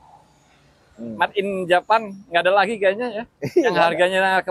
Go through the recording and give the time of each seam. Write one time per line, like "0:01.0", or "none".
none